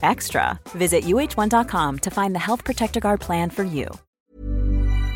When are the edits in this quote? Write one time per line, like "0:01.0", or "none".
0:04.0